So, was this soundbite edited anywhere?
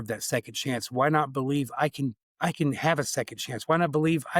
yes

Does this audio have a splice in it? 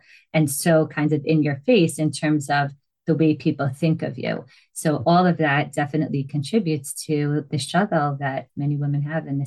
yes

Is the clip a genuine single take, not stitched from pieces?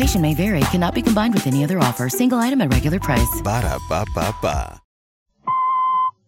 no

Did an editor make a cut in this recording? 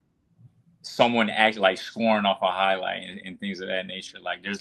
no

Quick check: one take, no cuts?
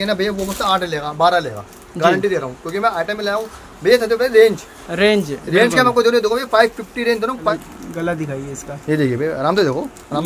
no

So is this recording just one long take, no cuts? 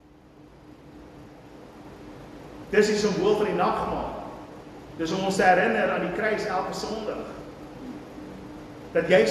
no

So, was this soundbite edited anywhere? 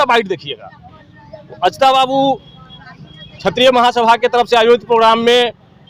no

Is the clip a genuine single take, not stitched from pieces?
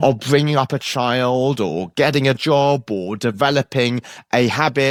yes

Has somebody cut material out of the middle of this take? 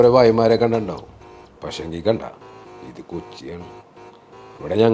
no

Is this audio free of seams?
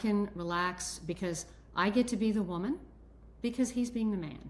yes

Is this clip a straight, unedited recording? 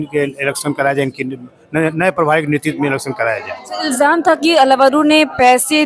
yes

